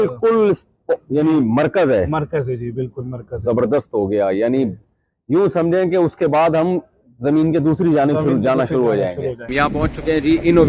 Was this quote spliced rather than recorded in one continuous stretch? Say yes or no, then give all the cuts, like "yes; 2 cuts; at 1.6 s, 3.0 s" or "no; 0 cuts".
yes; 1 cut; at 9.4 s